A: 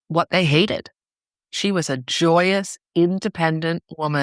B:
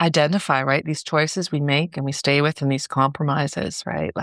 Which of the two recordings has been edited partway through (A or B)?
A